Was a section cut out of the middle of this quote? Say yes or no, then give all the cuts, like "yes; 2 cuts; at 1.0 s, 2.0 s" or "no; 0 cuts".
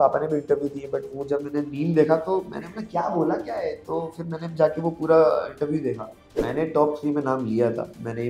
yes; 1 cut; at 6.3 s